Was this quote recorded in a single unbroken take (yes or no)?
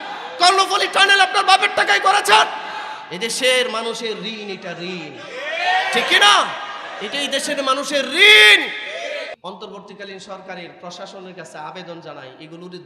no